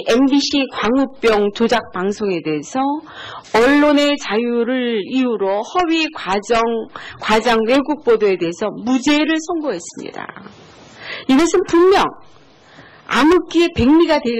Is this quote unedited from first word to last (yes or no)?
no